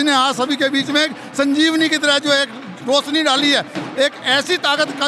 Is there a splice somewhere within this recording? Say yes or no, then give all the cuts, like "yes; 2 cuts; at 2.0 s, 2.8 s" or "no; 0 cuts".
no; 0 cuts